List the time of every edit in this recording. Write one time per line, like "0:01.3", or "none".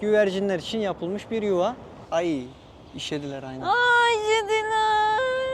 0:01.9